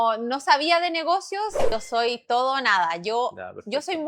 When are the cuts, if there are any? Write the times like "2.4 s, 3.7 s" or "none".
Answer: 1.7 s

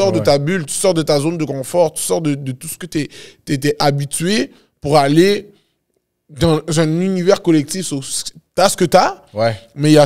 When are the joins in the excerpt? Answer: none

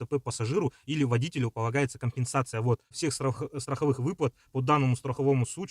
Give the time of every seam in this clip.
3.0 s

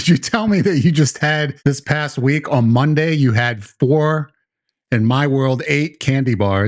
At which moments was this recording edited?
1.5 s

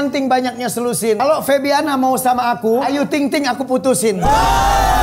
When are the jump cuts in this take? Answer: 1.2 s, 2.9 s

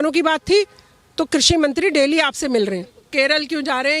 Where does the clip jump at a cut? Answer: 3.1 s

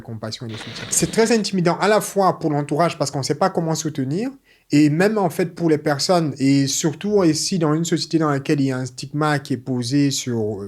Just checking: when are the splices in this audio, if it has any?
0.9 s

